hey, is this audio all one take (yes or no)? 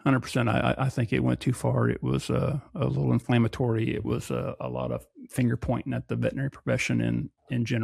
yes